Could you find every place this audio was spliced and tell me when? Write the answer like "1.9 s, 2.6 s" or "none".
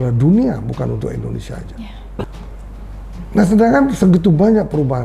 2.2 s

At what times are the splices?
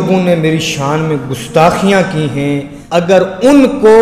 2.7 s

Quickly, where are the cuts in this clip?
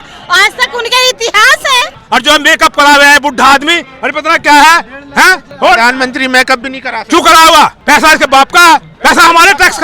1.9 s, 5.4 s, 7.8 s, 8.9 s

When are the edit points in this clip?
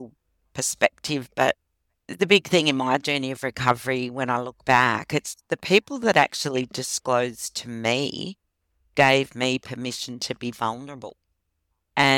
2.1 s

